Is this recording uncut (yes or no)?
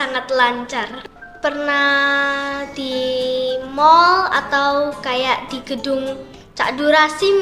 no